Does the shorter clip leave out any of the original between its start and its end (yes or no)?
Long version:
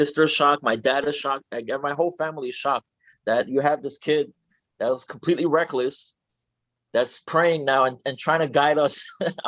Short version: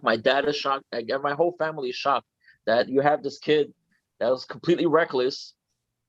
no